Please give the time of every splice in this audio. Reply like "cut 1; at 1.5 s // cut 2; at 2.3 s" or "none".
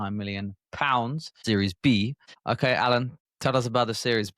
cut 1; at 1.3 s // cut 2; at 2.3 s // cut 3; at 3.2 s